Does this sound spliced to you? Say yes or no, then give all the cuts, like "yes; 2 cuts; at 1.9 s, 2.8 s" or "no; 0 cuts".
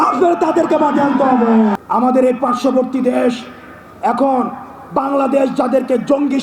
no; 0 cuts